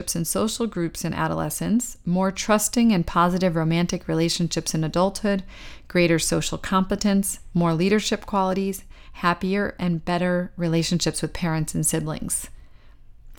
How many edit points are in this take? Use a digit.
0